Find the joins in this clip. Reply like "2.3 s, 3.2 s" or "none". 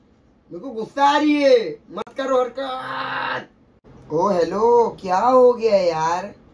3.9 s